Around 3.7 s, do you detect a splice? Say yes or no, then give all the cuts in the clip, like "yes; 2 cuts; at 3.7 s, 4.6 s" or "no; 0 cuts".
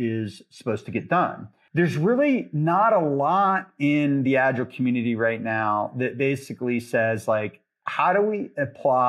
no; 1 cut; at 1.5 s